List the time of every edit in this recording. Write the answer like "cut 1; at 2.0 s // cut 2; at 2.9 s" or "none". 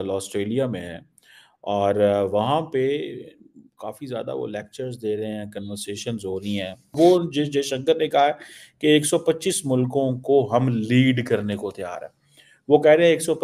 cut 1; at 6.8 s